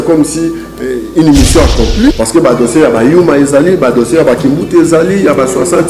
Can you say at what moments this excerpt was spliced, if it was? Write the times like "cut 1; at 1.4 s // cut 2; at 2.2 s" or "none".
cut 1; at 2.1 s